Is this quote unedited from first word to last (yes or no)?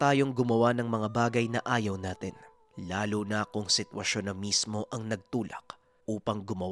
yes